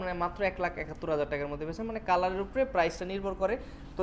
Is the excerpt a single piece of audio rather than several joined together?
yes; 0 cuts

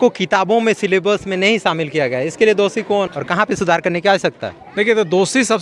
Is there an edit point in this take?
yes; 1 cut; at 3.1 s

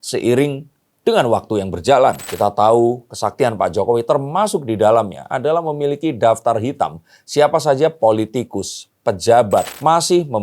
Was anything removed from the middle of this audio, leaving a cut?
yes; 2 cuts; at 2.2 s, 9.7 s

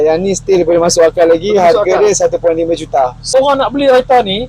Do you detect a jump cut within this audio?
yes; 1 cut; at 3.3 s

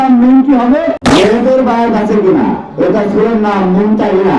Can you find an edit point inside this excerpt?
yes; 1 cut; at 1.0 s

